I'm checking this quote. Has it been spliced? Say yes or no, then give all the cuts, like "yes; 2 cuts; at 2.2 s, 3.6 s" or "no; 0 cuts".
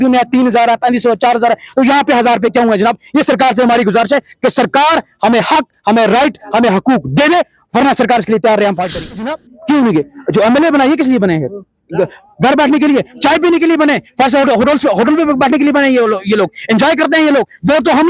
yes; 1 cut; at 9.5 s